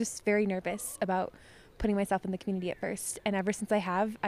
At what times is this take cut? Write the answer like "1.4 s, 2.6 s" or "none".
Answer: none